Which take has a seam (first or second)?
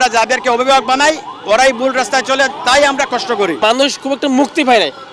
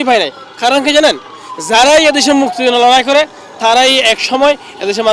first